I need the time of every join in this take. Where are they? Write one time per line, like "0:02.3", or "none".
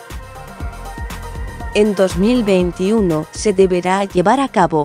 0:01.6
0:03.0